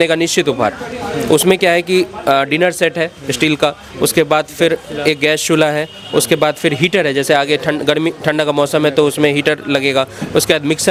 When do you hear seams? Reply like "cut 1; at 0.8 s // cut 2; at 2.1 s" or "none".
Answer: none